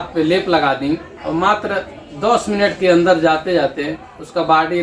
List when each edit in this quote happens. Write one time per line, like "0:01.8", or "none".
none